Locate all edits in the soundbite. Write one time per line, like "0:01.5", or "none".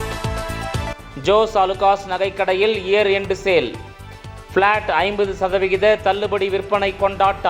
0:01.0